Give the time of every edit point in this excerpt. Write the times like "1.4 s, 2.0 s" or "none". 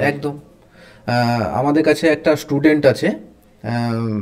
none